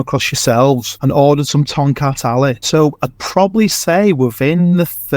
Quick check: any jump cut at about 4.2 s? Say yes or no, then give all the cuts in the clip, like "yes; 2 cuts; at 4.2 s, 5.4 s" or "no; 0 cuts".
no; 2 cuts; at 0.9 s, 2.6 s